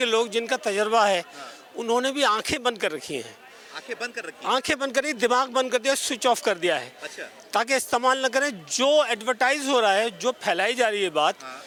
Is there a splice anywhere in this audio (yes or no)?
no